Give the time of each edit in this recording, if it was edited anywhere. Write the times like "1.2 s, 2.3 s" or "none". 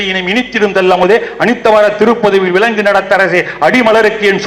none